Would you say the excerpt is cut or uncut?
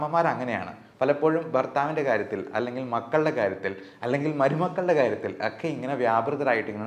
uncut